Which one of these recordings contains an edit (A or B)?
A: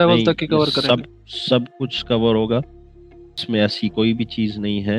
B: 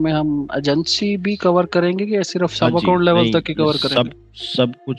A